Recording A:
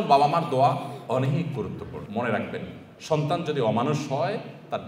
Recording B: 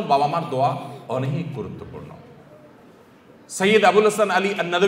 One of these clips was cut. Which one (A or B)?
A